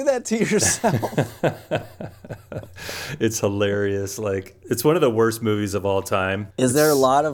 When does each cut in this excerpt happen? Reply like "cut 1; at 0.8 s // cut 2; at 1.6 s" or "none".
cut 1; at 4.8 s